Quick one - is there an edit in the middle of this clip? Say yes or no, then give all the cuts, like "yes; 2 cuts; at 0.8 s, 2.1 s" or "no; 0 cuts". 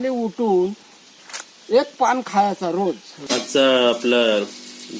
yes; 1 cut; at 3.1 s